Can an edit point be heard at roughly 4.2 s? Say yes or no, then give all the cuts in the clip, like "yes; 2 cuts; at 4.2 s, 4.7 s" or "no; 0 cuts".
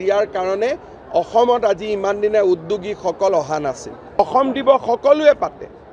yes; 1 cut; at 4.2 s